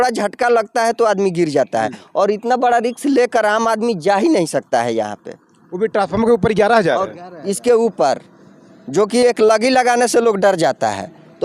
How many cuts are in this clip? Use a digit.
0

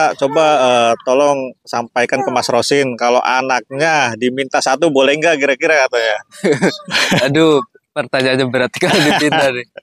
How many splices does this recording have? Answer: 0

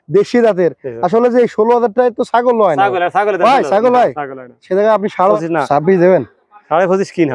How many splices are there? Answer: 1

